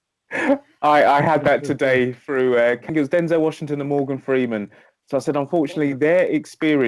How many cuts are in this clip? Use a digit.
1